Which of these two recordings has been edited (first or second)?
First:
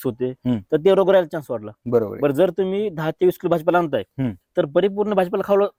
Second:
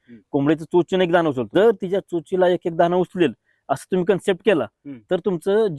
second